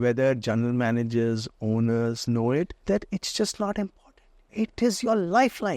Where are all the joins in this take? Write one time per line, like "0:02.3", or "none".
0:02.8